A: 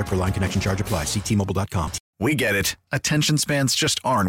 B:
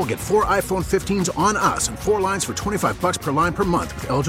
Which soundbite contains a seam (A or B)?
A